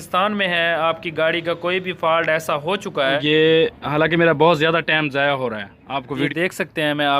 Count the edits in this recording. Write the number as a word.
two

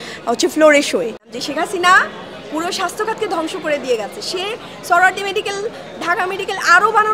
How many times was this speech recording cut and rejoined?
one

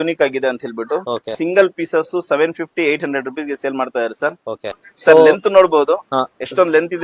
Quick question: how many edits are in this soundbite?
two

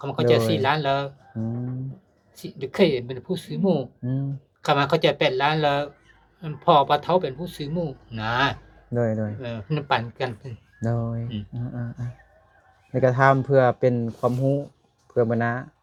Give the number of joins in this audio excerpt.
zero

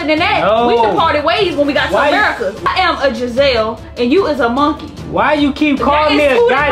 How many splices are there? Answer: one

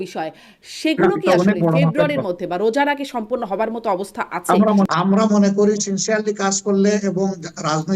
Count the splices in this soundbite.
one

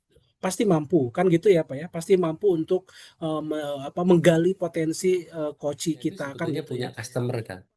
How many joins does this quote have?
one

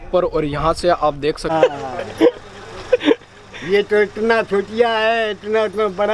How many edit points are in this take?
one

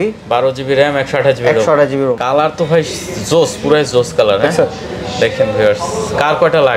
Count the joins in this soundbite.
one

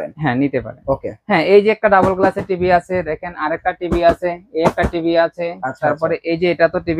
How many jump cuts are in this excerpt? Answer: one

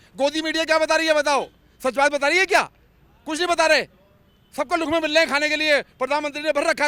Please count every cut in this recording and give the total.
zero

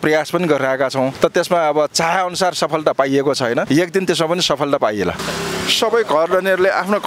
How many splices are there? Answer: one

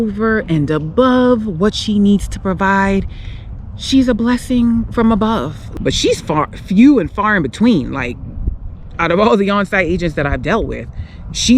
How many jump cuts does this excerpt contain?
one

